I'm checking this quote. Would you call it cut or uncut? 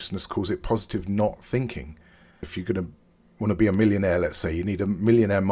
cut